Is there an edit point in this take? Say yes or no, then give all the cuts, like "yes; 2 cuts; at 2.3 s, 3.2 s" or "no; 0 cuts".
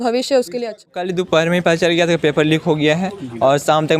yes; 1 cut; at 1.0 s